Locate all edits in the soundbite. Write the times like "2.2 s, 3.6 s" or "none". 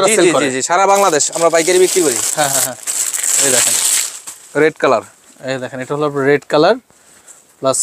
none